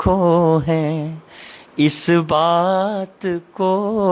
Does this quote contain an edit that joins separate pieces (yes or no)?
no